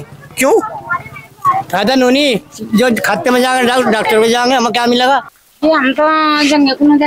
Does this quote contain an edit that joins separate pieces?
yes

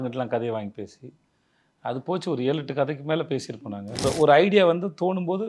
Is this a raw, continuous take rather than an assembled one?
no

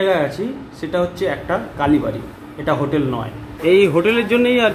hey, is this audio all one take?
no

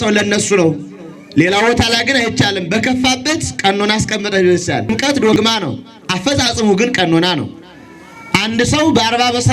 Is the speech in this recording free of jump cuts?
no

